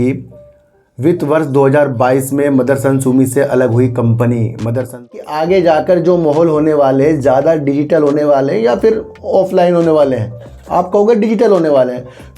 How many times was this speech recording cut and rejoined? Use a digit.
1